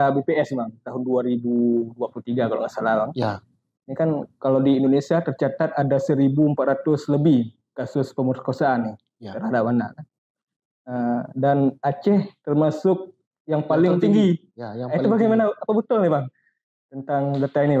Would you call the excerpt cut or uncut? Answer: uncut